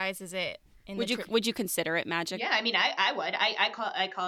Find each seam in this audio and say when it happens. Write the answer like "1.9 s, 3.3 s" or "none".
2.3 s